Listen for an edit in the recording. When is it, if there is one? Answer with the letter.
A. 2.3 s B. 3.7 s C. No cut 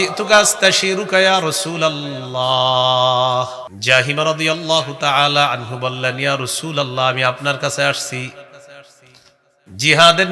B